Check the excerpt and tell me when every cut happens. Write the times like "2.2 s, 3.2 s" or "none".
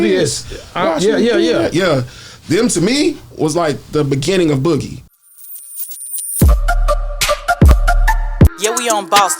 5.0 s